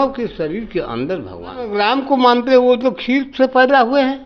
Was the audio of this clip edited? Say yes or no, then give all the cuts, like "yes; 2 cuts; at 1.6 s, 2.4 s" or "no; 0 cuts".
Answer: yes; 1 cut; at 1.7 s